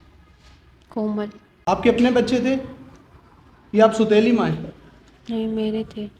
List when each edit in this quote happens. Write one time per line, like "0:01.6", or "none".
0:01.5